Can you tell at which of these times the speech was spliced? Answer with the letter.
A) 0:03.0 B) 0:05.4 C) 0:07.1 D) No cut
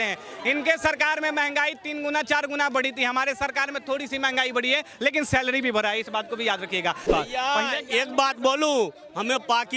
C